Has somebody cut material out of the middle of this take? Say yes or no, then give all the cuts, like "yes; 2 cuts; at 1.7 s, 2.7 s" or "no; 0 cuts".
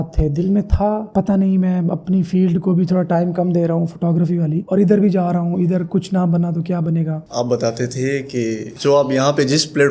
yes; 1 cut; at 7.2 s